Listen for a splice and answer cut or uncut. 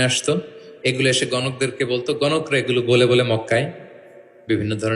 uncut